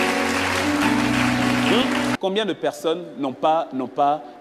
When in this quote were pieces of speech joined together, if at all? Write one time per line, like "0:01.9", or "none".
0:02.2